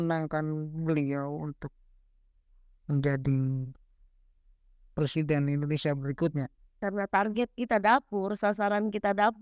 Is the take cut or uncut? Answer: cut